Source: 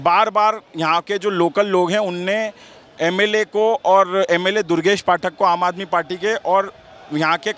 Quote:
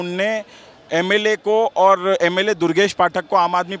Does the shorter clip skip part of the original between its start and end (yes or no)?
no